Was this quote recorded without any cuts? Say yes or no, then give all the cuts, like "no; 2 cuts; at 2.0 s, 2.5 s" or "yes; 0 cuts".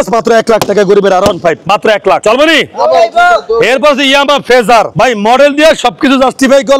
yes; 0 cuts